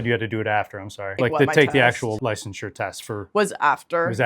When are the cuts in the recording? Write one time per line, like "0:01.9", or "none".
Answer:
0:01.1
0:02.2